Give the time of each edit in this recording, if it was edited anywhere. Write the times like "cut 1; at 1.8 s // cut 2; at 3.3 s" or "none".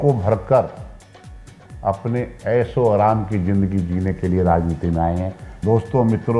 cut 1; at 5.4 s